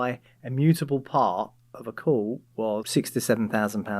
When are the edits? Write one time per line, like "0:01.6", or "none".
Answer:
0:02.9